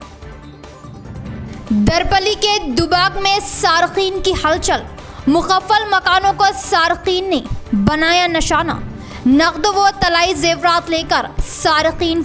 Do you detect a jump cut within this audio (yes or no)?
yes